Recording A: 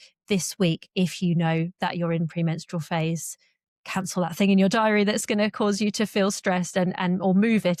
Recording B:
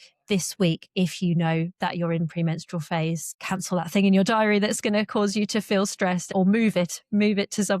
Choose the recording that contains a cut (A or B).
B